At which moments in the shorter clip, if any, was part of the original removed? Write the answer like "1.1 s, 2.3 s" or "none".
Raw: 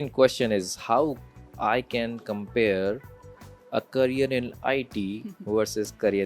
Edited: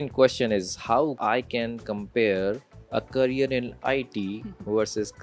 1.2 s, 2.7 s